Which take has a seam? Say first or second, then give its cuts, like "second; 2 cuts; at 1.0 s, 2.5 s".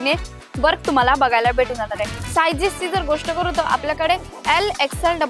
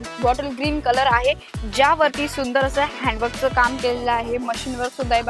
first; 1 cut; at 2.1 s